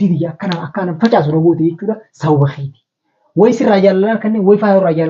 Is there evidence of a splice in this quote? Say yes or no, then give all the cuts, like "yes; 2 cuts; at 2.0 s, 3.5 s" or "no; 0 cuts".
no; 0 cuts